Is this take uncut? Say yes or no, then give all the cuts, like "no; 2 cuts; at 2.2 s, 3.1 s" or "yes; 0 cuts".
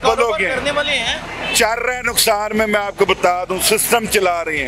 yes; 0 cuts